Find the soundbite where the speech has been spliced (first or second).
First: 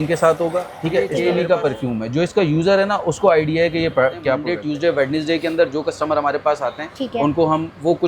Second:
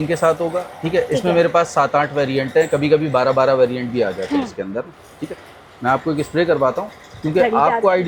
first